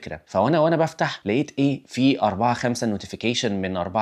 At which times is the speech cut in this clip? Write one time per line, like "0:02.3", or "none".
none